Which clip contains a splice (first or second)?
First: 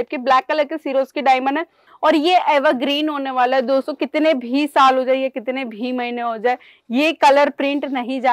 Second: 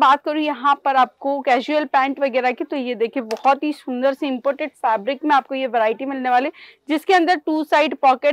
first